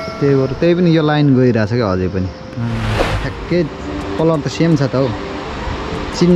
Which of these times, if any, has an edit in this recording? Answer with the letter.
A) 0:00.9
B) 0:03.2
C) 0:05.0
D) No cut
B